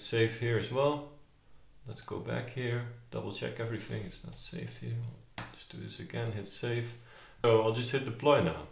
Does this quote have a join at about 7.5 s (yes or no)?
yes